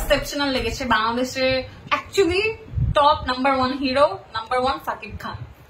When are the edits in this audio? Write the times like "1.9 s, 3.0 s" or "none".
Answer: none